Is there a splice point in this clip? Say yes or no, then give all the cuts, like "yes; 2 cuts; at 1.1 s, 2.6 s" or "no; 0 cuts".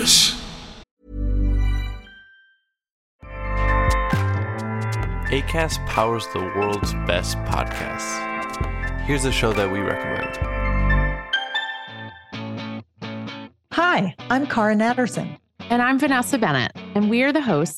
yes; 1 cut; at 0.9 s